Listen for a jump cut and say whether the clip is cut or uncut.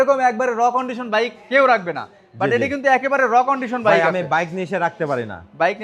uncut